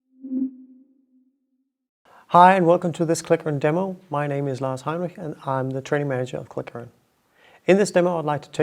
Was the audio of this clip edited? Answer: no; 0 cuts

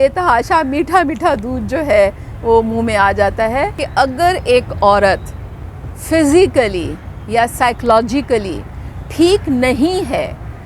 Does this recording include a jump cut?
yes; 1 cut; at 3.8 s

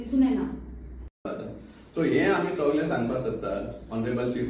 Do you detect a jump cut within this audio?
no; 0 cuts

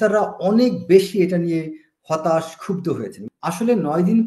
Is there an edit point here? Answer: yes; 1 cut; at 3.2 s

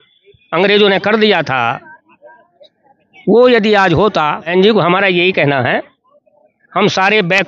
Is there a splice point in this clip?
yes; 1 cut; at 4.4 s

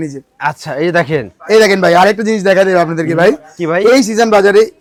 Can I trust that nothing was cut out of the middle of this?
yes; 0 cuts

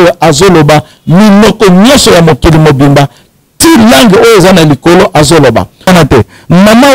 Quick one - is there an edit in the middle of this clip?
yes; 1 cut; at 5.9 s

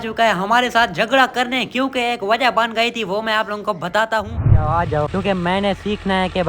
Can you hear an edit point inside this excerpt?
yes; 1 cut; at 4.5 s

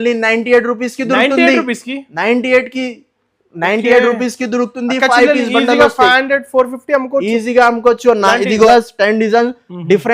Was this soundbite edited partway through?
yes; 1 cut; at 8.7 s

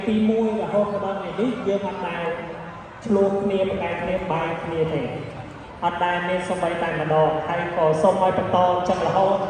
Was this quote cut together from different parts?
no; 0 cuts

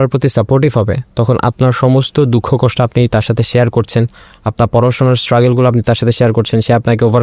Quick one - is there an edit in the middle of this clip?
no; 0 cuts

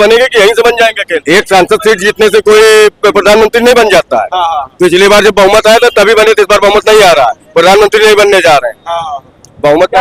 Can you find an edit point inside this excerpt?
no; 0 cuts

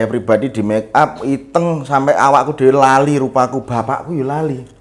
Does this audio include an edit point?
no; 0 cuts

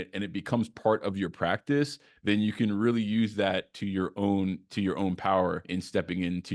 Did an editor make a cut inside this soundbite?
yes; 1 cut; at 5.6 s

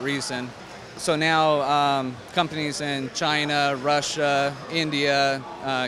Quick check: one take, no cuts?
no; 1 cut; at 1.0 s

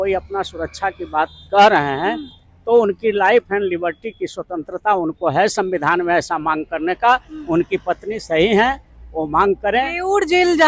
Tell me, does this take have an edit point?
no; 0 cuts

